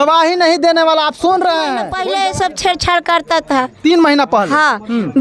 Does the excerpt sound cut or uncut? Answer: cut